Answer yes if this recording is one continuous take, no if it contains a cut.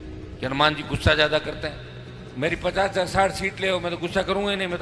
yes